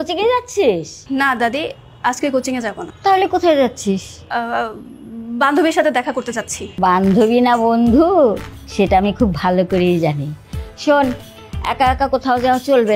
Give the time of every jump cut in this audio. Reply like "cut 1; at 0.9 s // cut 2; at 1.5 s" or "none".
cut 1; at 1.0 s // cut 2; at 2.9 s // cut 3; at 4.2 s // cut 4; at 6.6 s